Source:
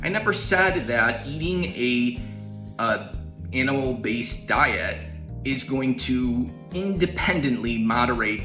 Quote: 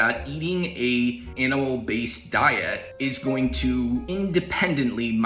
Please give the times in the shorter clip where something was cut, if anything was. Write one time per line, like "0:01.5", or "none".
0:01.3
0:02.8
0:04.1